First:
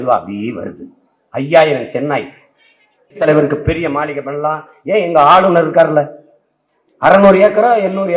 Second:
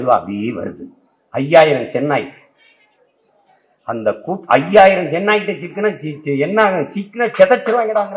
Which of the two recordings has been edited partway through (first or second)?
first